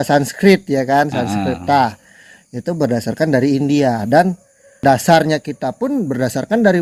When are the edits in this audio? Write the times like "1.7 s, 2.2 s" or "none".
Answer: 4.8 s